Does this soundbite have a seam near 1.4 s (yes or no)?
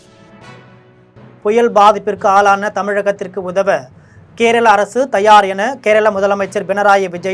yes